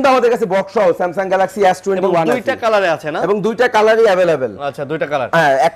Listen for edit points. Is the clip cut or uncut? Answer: uncut